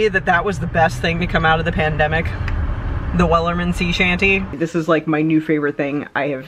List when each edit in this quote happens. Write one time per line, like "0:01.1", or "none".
0:04.5